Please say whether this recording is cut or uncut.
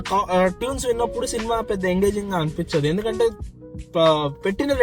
uncut